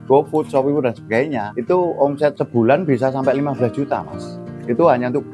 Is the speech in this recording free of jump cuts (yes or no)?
yes